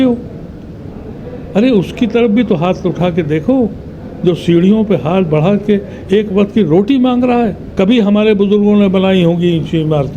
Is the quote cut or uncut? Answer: cut